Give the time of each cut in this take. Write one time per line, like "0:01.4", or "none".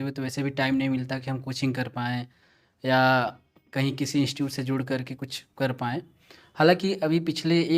none